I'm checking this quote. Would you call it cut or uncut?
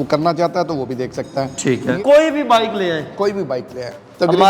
cut